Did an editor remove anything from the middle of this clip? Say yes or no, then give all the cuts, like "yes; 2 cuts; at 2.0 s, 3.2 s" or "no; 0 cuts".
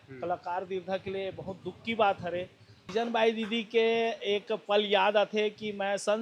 yes; 1 cut; at 2.8 s